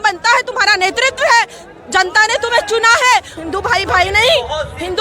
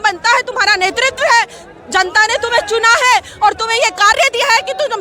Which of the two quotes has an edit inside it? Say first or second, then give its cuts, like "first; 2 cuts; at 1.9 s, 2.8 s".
first; 1 cut; at 3.3 s